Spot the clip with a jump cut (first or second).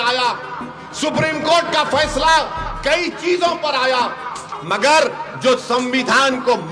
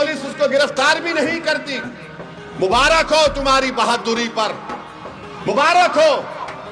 first